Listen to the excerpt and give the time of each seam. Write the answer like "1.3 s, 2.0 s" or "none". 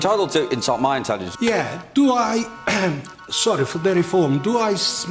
1.3 s